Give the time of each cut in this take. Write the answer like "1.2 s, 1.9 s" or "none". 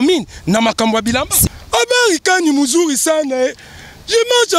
1.4 s